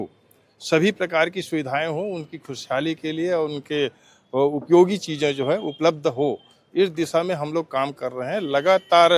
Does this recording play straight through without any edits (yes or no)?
yes